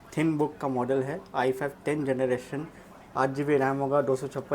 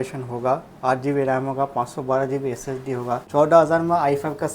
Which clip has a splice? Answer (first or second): second